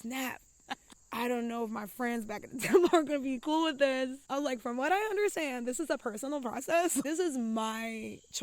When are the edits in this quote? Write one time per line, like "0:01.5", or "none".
0:01.0
0:04.2
0:07.0